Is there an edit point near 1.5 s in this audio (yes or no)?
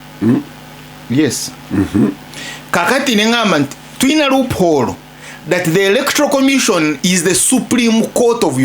yes